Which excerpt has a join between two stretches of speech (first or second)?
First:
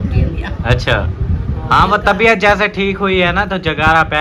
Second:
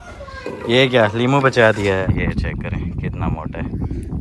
second